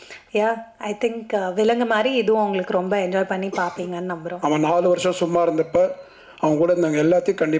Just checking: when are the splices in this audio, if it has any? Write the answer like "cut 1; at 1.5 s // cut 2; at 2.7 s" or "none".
cut 1; at 4.3 s